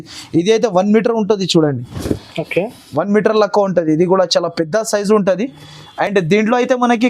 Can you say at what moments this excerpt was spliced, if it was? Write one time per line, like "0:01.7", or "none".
none